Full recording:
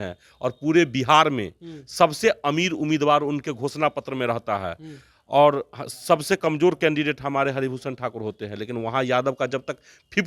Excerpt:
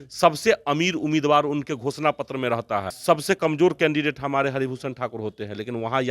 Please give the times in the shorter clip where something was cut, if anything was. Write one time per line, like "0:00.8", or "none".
0:02.9